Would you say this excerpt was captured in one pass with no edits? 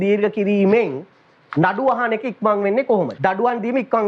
no; 1 cut; at 3.1 s

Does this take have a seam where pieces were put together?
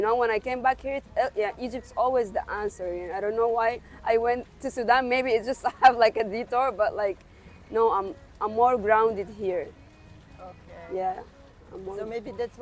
no; 0 cuts

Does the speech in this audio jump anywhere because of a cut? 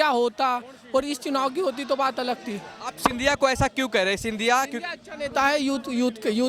no; 0 cuts

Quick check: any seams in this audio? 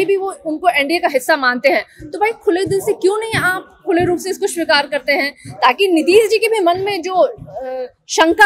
no; 0 cuts

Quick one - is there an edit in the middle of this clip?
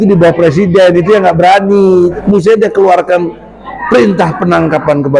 yes; 1 cut; at 2.2 s

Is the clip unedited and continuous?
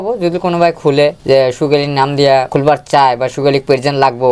no; 2 cuts; at 1.2 s, 2.5 s

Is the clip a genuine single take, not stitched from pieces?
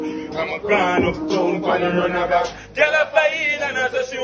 yes; 0 cuts

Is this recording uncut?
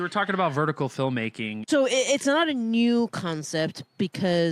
no; 1 cut; at 1.5 s

